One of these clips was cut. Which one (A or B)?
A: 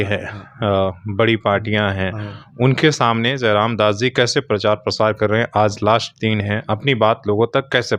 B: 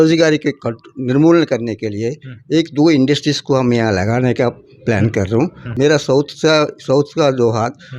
B